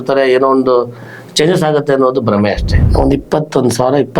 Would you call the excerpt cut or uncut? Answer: cut